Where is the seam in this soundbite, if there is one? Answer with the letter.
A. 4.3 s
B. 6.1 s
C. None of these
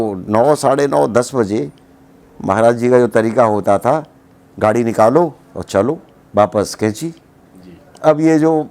B